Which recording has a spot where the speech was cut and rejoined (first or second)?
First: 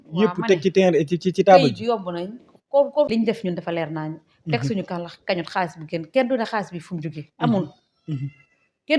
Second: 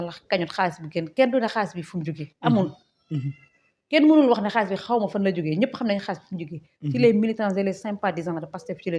first